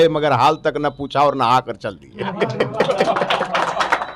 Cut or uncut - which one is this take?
uncut